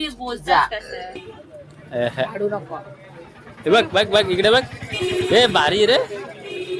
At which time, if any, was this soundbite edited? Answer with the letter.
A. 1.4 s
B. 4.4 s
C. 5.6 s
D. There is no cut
A